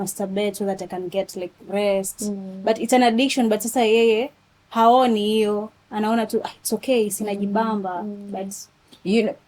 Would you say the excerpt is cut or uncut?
uncut